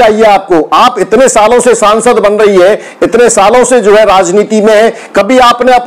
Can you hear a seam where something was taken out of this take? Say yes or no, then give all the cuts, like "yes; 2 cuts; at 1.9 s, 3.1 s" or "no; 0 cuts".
no; 0 cuts